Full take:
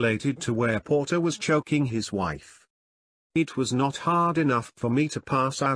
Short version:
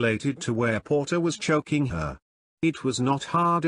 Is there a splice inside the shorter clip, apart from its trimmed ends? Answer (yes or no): yes